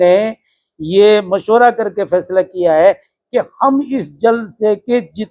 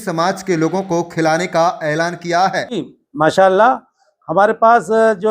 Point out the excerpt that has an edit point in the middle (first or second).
second